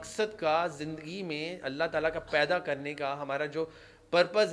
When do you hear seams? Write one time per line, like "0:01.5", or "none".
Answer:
none